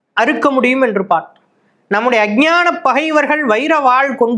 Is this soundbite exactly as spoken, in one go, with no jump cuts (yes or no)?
yes